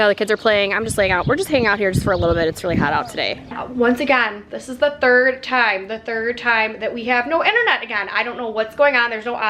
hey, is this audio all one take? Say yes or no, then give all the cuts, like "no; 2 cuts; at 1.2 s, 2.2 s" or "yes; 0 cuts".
no; 1 cut; at 3.5 s